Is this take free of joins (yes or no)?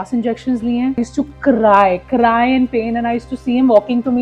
no